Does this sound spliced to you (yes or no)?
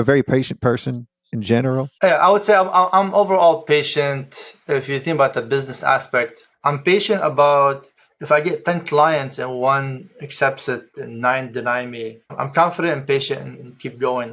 yes